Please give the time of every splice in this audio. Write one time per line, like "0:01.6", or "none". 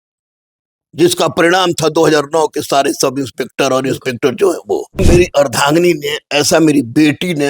0:05.0